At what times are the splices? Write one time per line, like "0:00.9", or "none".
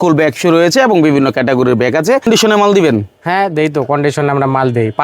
0:02.2